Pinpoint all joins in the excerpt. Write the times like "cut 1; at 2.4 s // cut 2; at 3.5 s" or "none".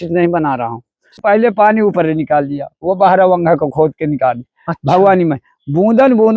cut 1; at 1.2 s